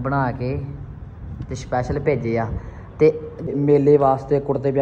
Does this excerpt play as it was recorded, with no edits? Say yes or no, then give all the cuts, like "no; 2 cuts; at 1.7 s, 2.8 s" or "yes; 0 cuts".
no; 1 cut; at 3.5 s